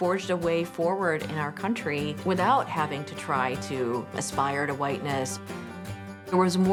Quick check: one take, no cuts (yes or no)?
yes